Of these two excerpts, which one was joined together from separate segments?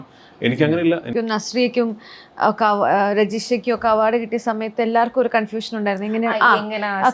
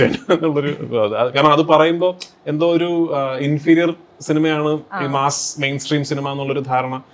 first; 1 cut; at 1.1 s

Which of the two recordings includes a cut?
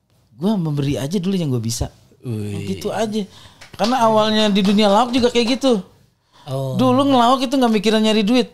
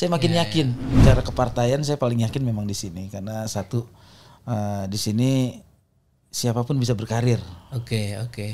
second; 1 cut; at 1.0 s

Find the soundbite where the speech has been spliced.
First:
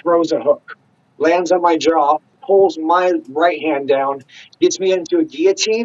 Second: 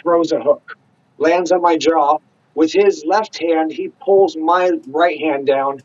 first; 1 cut; at 2.3 s

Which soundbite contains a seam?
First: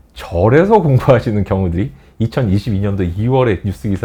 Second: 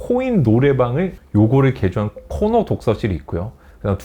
second; 1 cut; at 1.2 s

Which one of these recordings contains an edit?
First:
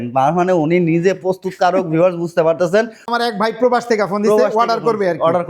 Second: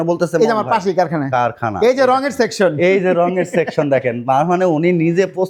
first; 1 cut; at 3.1 s

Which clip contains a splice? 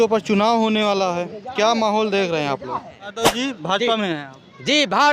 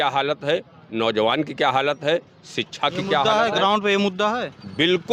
first; 1 cut; at 3.1 s

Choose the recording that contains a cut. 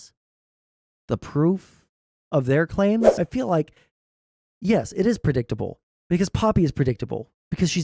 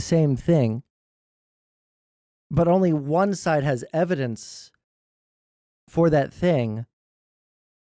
first; 1 cut; at 3.1 s

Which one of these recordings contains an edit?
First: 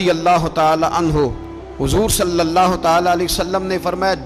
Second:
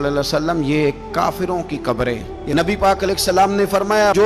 second; 1 cut; at 2.3 s

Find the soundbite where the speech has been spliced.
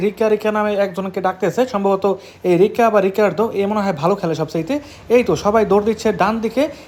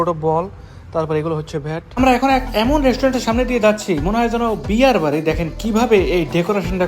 second; 1 cut; at 2.0 s

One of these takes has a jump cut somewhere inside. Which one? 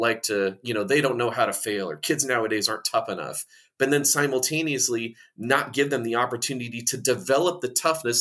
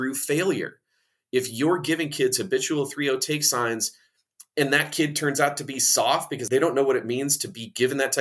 second; 1 cut; at 6.3 s

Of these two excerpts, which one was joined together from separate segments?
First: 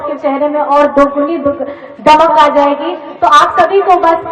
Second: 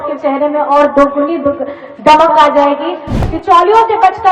second; 1 cut; at 3.1 s

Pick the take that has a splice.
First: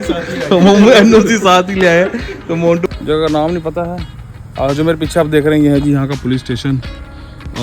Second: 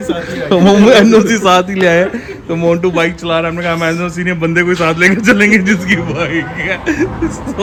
first; 1 cut; at 2.9 s

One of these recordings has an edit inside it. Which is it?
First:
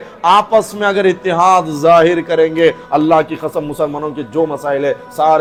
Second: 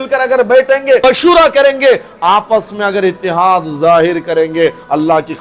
second; 1 cut; at 1.0 s

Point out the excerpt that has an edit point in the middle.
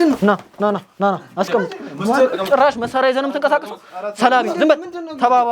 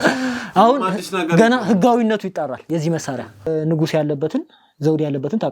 second; 1 cut; at 3.5 s

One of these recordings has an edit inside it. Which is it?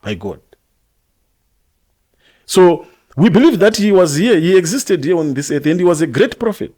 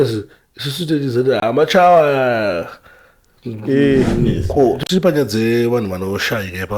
second; 1 cut; at 4.4 s

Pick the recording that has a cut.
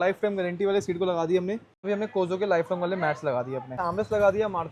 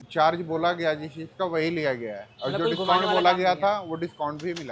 first; 2 cuts; at 1.9 s, 3.8 s

